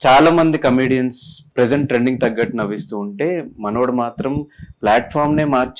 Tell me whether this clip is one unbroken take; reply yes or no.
no